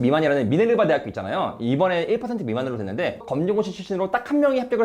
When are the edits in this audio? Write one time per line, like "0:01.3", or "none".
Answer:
0:03.3